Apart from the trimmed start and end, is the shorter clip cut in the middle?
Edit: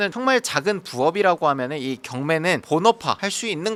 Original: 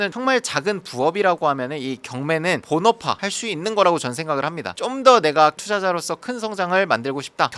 no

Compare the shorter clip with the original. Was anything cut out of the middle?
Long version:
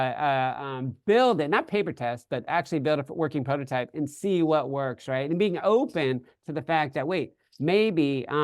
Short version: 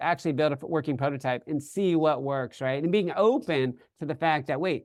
no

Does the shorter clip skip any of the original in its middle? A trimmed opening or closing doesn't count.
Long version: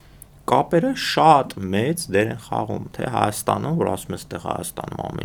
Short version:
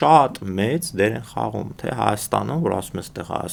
no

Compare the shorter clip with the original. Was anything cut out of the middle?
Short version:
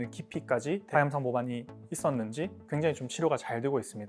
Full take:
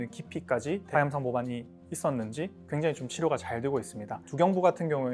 no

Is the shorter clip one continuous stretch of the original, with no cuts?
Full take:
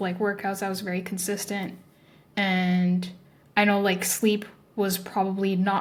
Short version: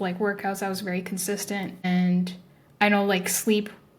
no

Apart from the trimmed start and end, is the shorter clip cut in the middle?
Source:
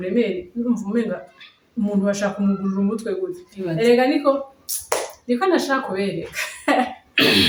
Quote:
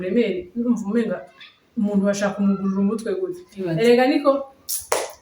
no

